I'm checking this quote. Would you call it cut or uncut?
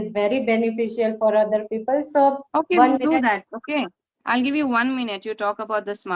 uncut